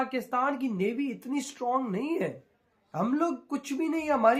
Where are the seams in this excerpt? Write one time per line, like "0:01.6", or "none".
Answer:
none